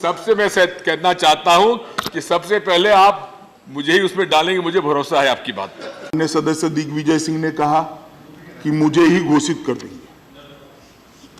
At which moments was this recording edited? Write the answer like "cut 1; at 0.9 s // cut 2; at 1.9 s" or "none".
cut 1; at 6.1 s